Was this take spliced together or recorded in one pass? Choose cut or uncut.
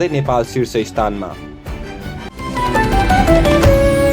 cut